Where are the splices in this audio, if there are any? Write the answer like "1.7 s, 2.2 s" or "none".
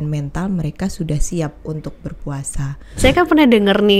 2.9 s